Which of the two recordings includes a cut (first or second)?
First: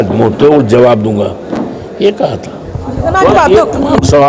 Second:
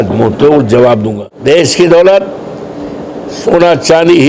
second